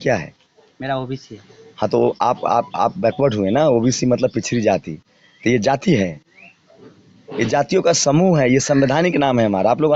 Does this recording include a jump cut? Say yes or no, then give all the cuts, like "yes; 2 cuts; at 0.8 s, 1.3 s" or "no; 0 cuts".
no; 0 cuts